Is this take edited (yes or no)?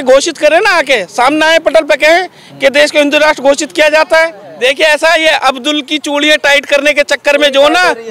yes